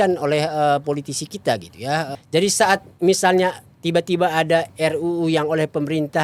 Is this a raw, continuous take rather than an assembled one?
no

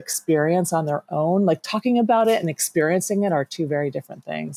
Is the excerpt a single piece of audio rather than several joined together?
yes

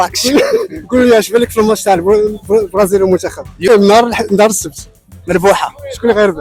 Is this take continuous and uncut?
yes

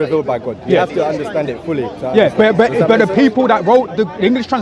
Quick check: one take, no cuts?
yes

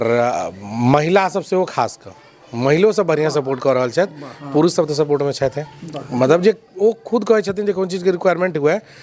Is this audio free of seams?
yes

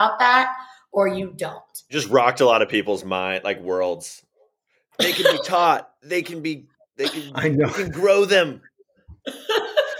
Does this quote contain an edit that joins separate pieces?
yes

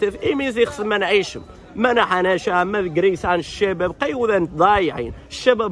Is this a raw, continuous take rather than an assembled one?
yes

